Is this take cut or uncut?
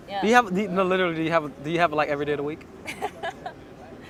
uncut